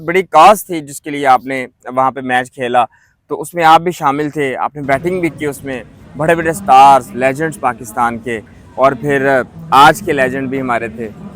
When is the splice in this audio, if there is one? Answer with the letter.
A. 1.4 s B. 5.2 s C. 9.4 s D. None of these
D